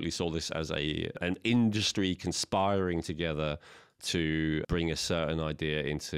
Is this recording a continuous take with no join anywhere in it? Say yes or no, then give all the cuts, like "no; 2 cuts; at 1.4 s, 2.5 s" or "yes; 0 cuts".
no; 2 cuts; at 1.2 s, 4.7 s